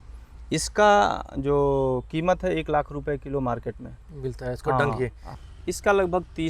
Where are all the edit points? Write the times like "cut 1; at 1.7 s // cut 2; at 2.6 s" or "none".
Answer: cut 1; at 5.3 s